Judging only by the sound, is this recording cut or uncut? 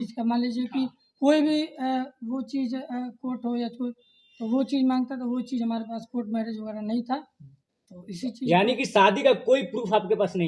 uncut